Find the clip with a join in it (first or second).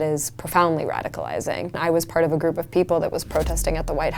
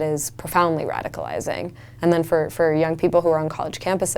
first